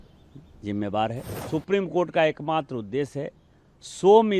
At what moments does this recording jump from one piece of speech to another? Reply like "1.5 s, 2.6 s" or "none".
1.3 s